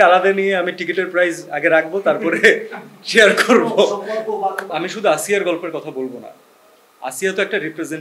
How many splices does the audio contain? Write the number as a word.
one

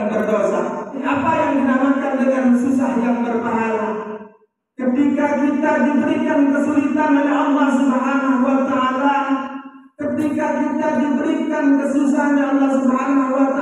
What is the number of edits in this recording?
one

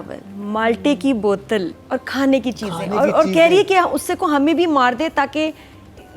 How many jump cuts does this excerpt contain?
one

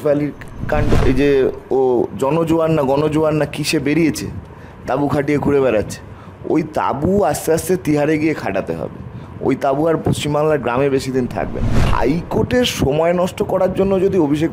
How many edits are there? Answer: two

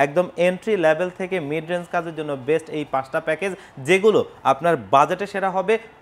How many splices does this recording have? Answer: zero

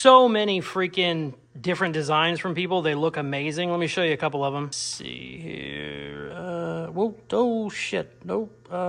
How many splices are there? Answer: zero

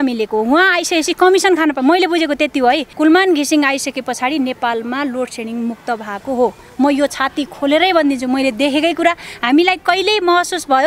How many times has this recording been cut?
one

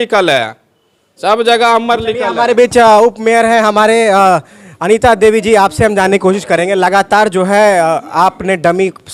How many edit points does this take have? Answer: zero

